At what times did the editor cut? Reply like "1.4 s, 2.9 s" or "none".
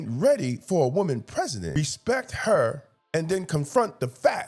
1.8 s, 2.9 s